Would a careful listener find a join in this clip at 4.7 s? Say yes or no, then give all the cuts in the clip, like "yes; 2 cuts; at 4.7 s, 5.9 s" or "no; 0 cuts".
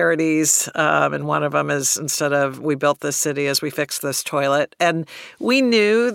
yes; 1 cut; at 4.7 s